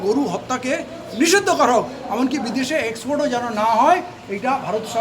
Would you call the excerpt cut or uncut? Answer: uncut